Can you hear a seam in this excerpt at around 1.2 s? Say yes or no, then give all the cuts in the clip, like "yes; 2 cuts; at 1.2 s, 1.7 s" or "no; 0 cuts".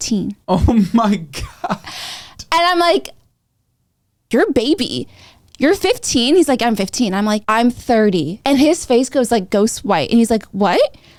no; 0 cuts